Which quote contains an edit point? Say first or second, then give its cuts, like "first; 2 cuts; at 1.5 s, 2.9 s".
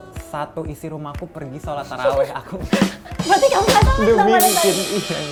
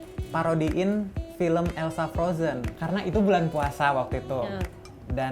second; 1 cut; at 2.7 s